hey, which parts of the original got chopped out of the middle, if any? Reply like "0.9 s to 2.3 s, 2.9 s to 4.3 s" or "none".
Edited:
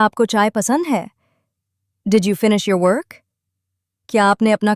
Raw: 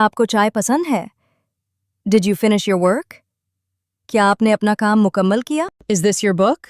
none